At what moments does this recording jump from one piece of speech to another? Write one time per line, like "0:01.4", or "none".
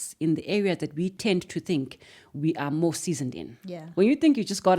0:01.2